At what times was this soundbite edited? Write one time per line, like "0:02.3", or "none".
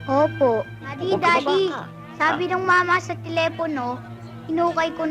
0:01.0